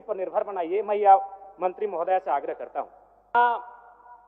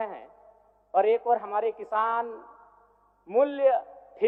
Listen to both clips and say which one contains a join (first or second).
first